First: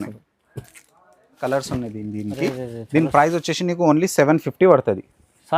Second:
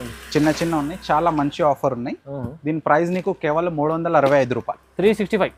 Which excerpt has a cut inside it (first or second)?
first